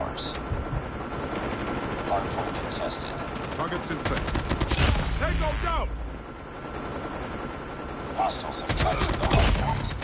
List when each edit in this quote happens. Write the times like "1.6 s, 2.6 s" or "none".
1.1 s